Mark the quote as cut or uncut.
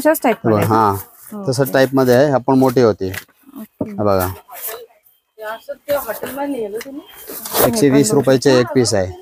uncut